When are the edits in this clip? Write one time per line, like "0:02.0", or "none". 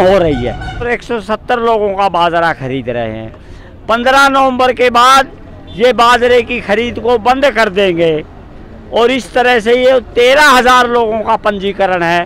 0:00.9